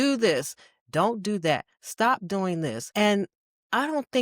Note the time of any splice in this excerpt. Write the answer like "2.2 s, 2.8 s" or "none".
2.8 s

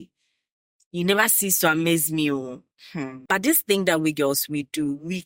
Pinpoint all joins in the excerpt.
3.1 s

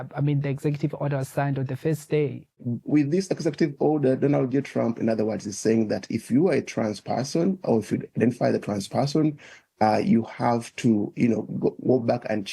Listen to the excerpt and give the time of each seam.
2.7 s

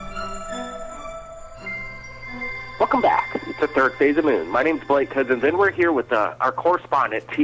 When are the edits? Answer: 6.4 s

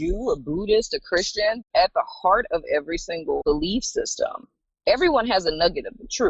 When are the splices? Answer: 1.6 s, 3.4 s

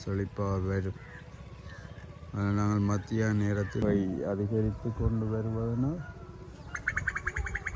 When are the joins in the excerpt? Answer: 3.8 s

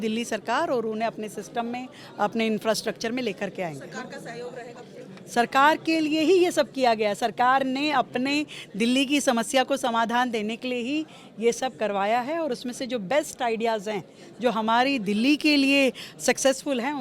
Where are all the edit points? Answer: none

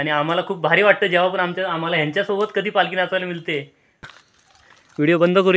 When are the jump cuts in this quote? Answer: 4.1 s

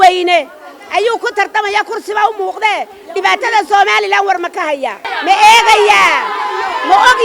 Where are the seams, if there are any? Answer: 5.1 s

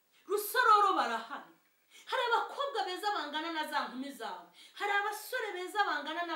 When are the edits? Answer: none

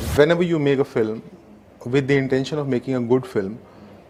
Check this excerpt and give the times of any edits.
none

